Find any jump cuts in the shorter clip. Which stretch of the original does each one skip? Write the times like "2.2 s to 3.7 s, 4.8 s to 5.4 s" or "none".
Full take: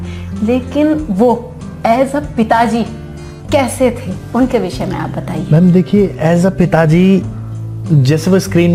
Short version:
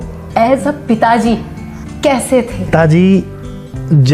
4.2 s to 6.7 s